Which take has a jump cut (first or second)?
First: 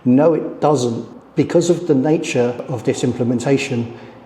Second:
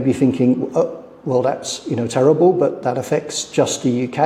first